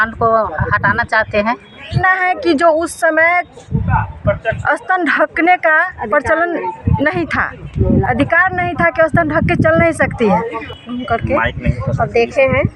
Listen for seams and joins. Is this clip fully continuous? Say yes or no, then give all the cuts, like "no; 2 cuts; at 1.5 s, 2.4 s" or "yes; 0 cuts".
no; 2 cuts; at 2.0 s, 10.6 s